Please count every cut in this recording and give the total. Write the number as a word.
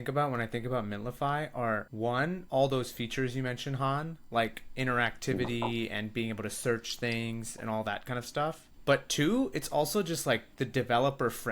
three